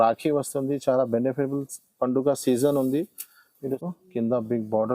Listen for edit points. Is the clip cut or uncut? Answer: cut